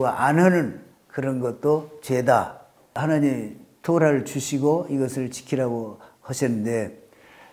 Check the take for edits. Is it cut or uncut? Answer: cut